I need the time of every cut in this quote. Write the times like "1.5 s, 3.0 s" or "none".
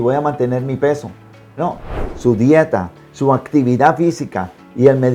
2.0 s